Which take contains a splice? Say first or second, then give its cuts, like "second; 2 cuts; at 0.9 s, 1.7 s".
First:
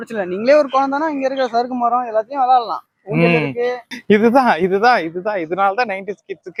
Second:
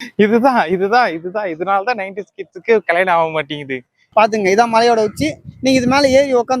second; 1 cut; at 4.0 s